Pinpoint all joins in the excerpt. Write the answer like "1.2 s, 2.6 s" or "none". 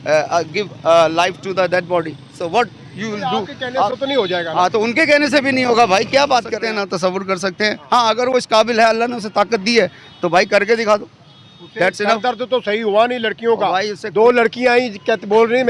6.6 s